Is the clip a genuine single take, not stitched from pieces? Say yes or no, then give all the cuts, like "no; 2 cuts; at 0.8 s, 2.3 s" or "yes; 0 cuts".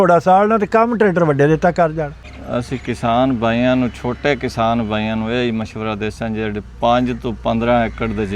no; 1 cut; at 2.2 s